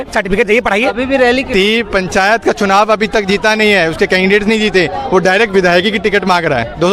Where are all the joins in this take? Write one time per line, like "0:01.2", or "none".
0:01.5